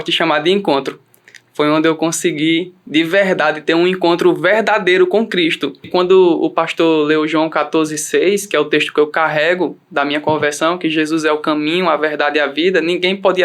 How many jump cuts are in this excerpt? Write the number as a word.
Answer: one